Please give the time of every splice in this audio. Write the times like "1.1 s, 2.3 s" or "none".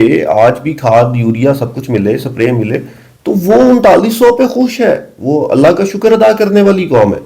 none